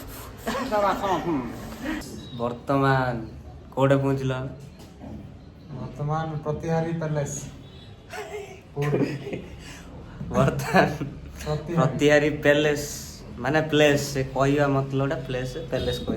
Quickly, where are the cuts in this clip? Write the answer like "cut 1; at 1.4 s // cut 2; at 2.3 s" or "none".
cut 1; at 1.8 s // cut 2; at 8.0 s // cut 3; at 13.3 s